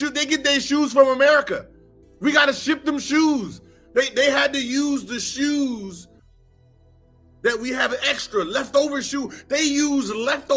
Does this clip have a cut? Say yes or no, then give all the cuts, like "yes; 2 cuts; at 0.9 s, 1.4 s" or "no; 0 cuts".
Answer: no; 0 cuts